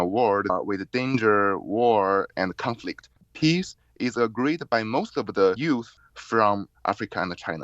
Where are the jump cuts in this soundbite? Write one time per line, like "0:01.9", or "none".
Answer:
0:03.3
0:05.9